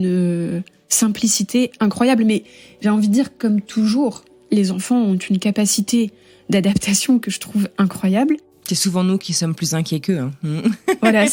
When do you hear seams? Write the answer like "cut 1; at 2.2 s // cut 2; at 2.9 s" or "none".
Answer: none